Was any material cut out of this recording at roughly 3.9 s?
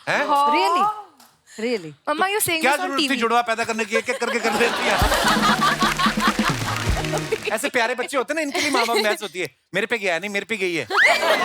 no; 1 cut; at 7.2 s

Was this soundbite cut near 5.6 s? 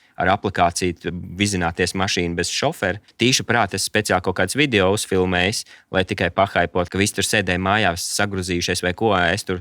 no; 2 cuts; at 3.0 s, 6.9 s

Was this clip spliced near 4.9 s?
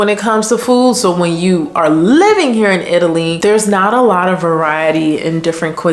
no; 1 cut; at 3.3 s

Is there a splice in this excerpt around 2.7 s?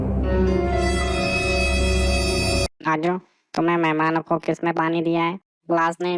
yes; 1 cut; at 2.7 s

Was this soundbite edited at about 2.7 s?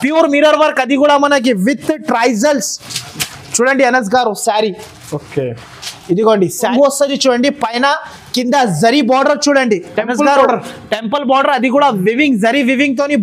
no; 1 cut; at 6.7 s

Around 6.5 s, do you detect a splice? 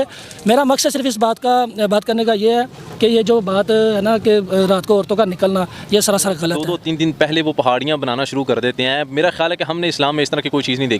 yes; 1 cut; at 6.5 s

